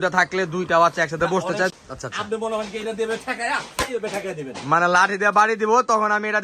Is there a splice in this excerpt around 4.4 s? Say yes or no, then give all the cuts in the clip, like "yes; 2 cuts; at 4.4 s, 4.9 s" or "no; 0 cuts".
no; 1 cut; at 1.7 s